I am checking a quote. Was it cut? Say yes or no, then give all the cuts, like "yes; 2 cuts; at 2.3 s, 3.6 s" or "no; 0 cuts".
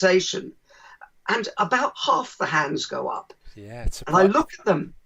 no; 0 cuts